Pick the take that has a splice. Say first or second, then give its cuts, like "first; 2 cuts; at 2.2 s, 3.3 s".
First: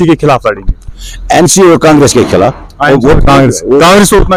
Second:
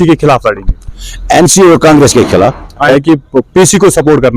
second; 1 cut; at 2.9 s